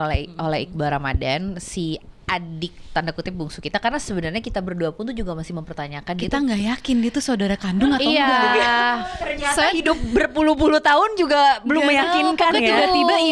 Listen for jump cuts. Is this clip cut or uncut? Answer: uncut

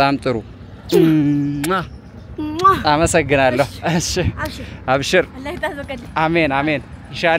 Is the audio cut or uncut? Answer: uncut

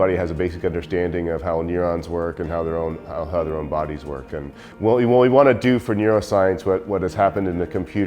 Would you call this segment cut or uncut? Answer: cut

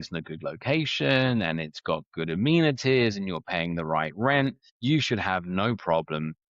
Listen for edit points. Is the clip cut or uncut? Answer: cut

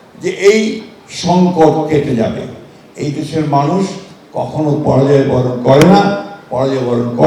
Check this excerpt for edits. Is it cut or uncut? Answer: uncut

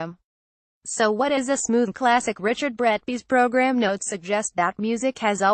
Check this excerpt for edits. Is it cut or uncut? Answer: uncut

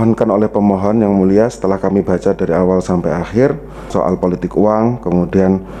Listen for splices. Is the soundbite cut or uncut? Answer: cut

